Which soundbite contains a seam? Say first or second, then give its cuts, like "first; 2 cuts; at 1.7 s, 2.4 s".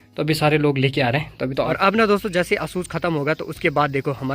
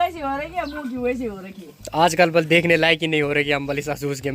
first; 1 cut; at 1.7 s